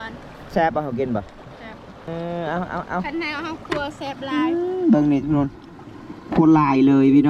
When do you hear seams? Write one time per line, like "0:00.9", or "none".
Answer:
0:02.1